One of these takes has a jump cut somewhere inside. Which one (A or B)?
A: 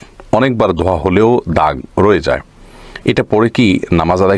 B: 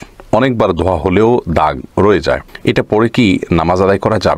B